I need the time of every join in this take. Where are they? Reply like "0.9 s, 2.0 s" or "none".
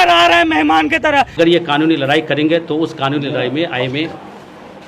1.3 s